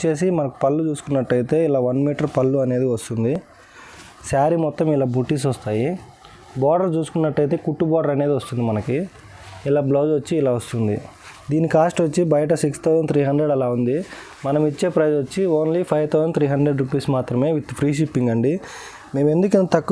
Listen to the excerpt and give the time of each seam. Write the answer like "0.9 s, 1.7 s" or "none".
none